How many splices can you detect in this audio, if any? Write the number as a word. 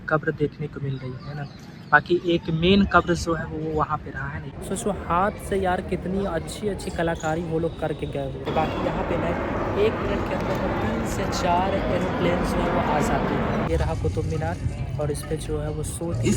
three